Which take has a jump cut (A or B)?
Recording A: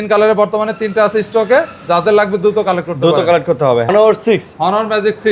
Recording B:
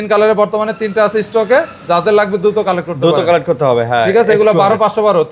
A